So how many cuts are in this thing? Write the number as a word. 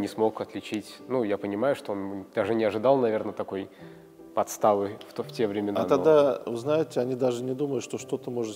zero